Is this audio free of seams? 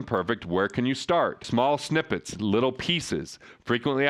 yes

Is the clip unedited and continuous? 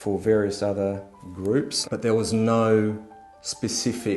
no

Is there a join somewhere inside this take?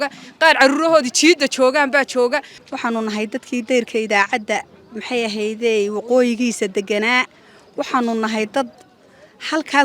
no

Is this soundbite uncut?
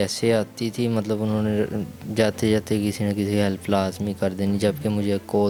yes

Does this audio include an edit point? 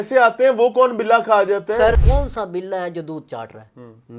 yes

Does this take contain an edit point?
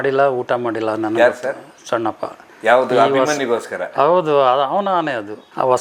no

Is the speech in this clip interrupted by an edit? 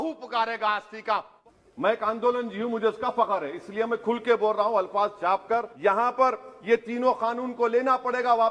yes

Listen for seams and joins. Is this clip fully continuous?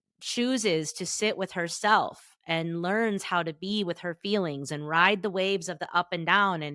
yes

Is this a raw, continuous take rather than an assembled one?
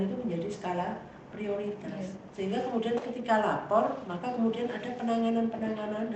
yes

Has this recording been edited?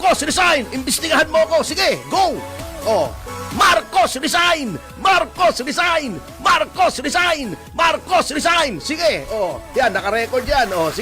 yes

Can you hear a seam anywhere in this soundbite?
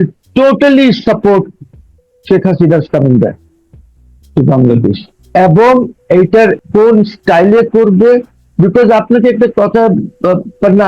yes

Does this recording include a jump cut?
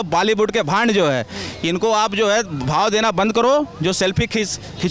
no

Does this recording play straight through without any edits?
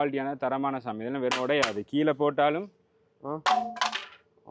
yes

